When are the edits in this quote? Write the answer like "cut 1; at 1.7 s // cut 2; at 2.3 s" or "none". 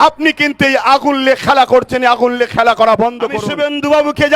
cut 1; at 3.4 s